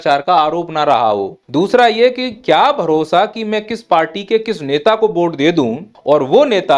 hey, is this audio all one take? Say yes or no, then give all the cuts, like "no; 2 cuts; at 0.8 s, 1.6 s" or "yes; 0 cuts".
no; 2 cuts; at 1.4 s, 5.9 s